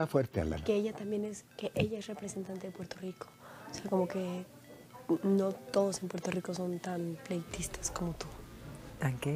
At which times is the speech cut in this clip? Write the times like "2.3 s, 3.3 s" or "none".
none